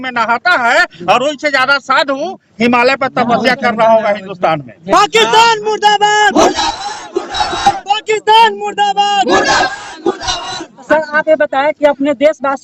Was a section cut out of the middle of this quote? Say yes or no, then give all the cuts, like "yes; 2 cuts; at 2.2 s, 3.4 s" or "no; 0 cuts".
no; 0 cuts